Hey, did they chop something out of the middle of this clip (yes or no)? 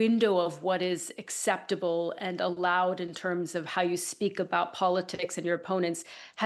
no